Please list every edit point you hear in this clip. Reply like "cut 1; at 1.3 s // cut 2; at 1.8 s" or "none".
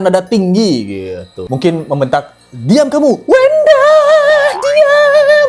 none

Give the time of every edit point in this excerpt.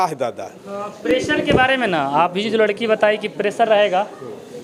none

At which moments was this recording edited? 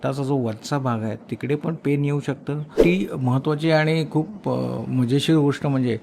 cut 1; at 2.8 s

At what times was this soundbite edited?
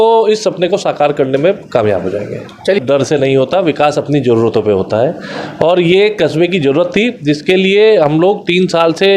cut 1; at 2.8 s

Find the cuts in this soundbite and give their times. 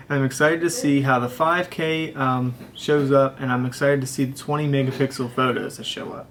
none

